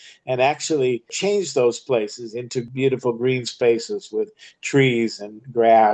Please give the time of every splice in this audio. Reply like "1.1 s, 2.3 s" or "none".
1.1 s, 2.7 s